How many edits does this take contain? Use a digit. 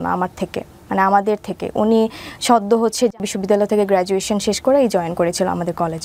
1